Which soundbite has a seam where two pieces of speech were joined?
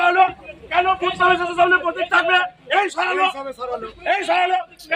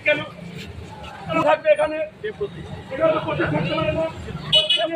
second; 1 cut; at 1.4 s

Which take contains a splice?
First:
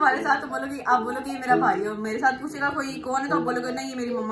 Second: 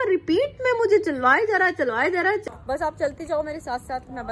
second; 1 cut; at 2.4 s

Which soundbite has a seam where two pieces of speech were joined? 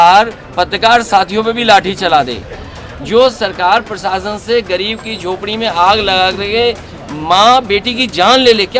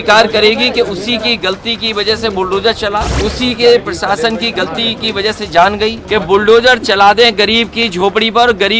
second; 2 cuts; at 3.1 s, 6.0 s

